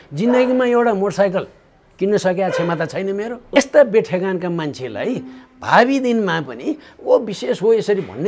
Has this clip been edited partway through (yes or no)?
yes